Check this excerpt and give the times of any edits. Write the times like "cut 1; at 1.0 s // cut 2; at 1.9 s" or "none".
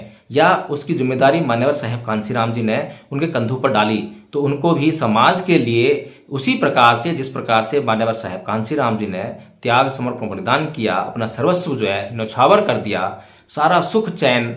none